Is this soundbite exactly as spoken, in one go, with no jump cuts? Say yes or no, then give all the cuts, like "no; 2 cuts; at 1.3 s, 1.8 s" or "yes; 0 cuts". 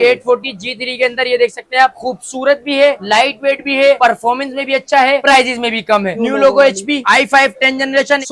no; 2 cuts; at 2.0 s, 6.1 s